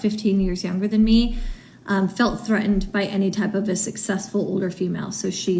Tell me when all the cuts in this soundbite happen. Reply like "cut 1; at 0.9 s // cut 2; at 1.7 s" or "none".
none